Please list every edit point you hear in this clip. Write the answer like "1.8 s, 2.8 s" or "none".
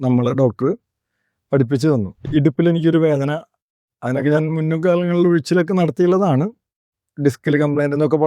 2.2 s